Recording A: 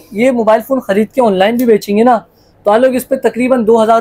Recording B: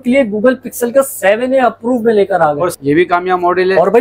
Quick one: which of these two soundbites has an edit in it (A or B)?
B